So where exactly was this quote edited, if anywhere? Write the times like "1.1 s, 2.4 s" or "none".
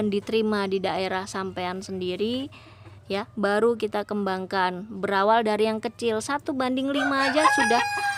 none